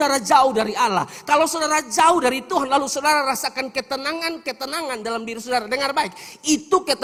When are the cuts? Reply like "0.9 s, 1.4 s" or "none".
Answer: none